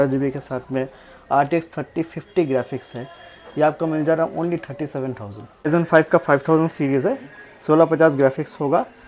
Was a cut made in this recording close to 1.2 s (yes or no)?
no